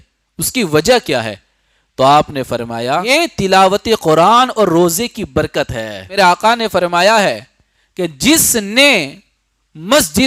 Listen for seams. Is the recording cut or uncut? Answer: cut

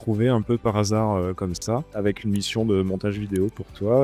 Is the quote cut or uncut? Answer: uncut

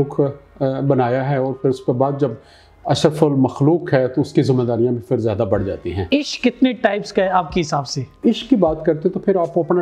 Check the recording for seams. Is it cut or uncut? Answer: cut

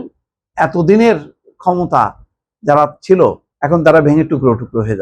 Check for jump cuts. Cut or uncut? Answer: cut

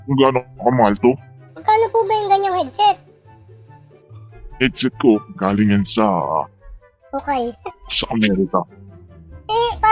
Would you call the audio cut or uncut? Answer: uncut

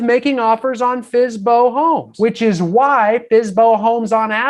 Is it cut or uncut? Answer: cut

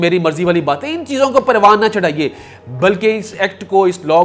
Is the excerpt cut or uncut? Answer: uncut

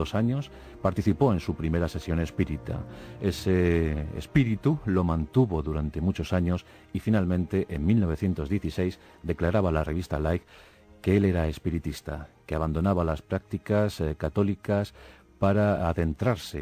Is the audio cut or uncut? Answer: cut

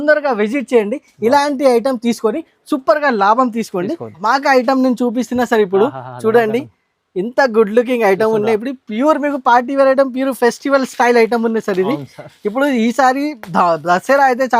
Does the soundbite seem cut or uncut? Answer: cut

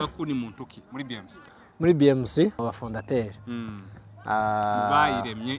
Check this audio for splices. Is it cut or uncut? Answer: cut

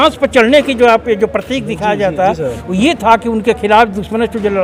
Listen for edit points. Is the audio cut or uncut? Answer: uncut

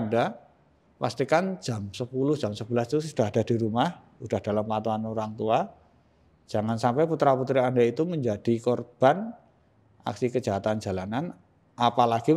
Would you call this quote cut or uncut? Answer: uncut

